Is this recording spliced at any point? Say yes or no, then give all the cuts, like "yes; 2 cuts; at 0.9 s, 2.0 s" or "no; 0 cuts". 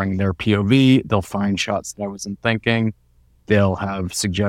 no; 0 cuts